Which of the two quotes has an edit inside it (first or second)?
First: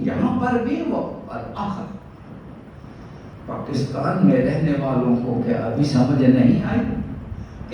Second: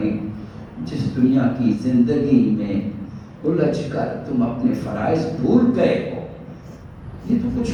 first